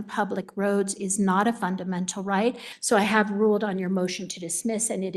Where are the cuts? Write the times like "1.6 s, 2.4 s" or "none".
2.7 s